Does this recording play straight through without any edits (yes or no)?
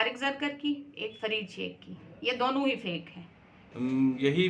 no